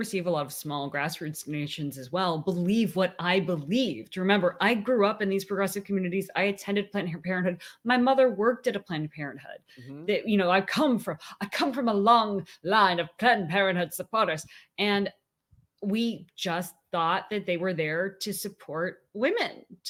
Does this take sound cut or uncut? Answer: uncut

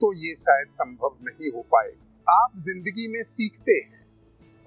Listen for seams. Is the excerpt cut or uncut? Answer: cut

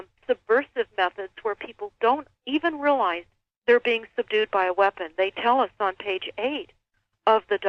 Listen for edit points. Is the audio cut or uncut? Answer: uncut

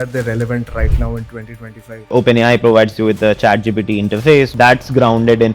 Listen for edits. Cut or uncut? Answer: cut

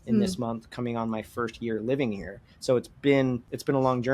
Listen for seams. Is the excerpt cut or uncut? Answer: uncut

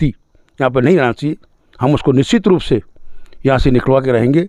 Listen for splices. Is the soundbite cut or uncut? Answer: uncut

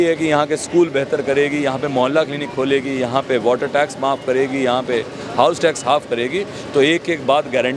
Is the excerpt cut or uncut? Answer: uncut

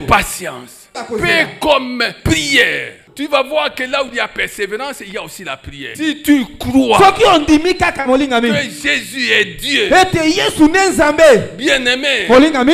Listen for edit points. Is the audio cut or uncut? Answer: cut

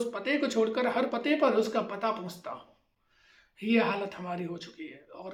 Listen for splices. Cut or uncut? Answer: uncut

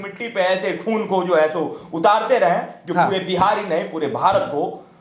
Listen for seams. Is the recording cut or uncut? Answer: uncut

